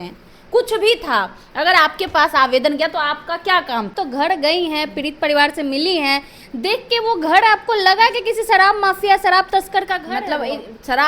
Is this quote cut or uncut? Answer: cut